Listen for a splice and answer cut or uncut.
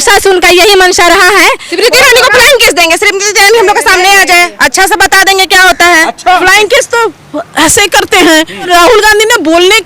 cut